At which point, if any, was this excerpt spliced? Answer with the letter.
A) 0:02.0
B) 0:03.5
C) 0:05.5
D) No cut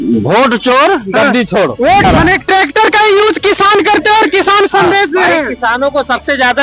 A